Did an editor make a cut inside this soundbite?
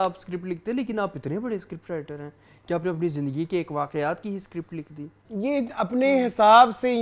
yes; 1 cut; at 5.2 s

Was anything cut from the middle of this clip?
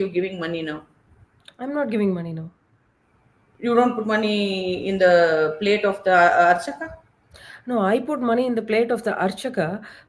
no; 0 cuts

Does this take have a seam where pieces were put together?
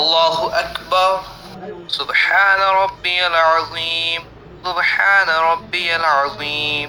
yes; 1 cut; at 1.2 s

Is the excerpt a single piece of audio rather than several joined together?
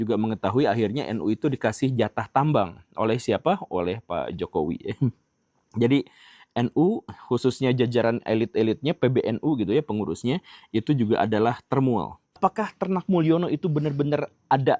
no; 1 cut; at 12.4 s

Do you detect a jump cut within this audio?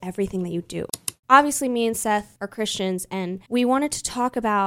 yes; 2 cuts; at 1.1 s, 3.4 s

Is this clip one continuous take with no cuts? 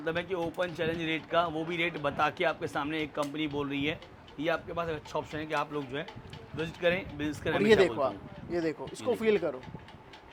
yes; 0 cuts

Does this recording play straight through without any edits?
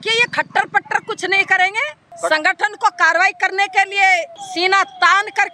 no; 2 cuts; at 2.0 s, 4.4 s

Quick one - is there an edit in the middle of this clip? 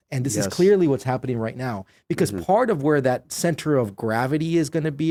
no; 0 cuts

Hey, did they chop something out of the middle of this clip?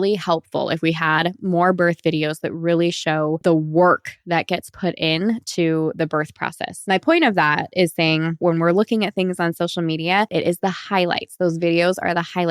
yes; 4 cuts; at 3.4 s, 6.7 s, 8.4 s, 10.3 s

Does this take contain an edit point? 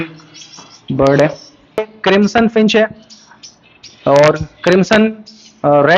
yes; 1 cut; at 1.9 s

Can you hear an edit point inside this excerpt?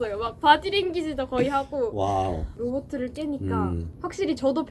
yes; 1 cut; at 2.5 s

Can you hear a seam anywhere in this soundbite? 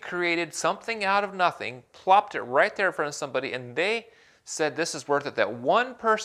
no; 0 cuts

